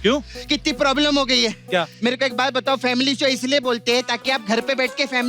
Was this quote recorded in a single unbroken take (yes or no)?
no